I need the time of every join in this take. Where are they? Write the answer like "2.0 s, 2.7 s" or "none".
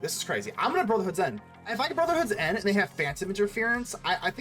1.7 s